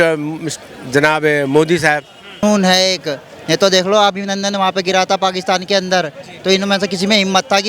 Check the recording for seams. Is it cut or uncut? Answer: cut